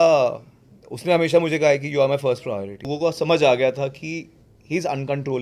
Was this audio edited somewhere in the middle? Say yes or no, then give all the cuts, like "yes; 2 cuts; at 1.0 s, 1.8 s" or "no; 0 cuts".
yes; 1 cut; at 2.9 s